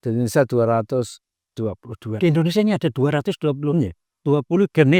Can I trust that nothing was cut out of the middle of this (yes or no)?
yes